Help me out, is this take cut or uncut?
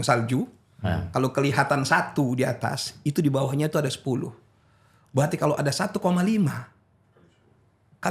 uncut